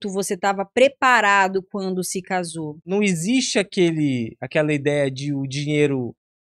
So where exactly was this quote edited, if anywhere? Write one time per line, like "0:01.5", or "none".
0:02.8